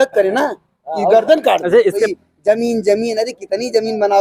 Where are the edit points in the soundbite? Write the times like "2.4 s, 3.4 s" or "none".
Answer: 2.1 s